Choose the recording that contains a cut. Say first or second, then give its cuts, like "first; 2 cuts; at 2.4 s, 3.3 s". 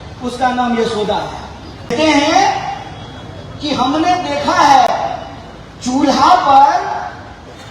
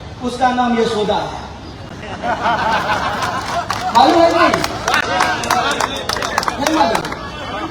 first; 1 cut; at 1.9 s